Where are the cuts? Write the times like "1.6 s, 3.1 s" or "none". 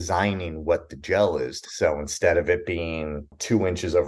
1.6 s